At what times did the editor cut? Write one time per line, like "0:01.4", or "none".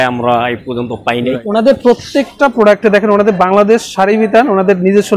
0:01.4